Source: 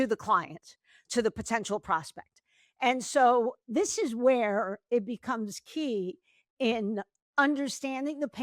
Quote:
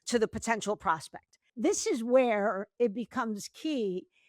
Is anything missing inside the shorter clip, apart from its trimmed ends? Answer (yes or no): yes